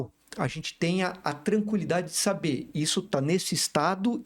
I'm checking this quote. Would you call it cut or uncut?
uncut